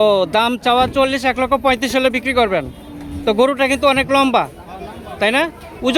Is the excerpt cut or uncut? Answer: uncut